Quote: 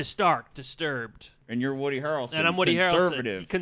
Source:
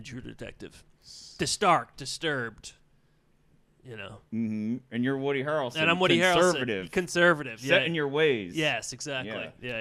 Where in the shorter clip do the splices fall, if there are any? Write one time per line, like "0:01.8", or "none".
0:01.4